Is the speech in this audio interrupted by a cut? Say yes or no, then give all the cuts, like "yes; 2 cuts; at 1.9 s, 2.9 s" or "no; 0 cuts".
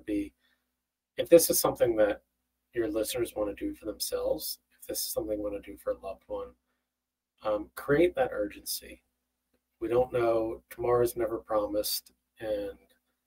no; 0 cuts